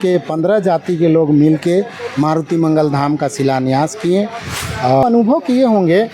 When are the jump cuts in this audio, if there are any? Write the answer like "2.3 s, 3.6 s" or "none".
5.0 s